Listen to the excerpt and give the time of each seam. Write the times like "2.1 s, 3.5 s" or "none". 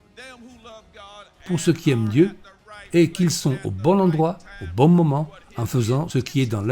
1.3 s